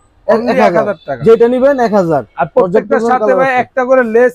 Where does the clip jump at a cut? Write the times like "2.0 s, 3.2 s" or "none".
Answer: none